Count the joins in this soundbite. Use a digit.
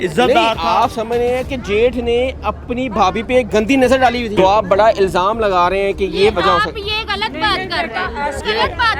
1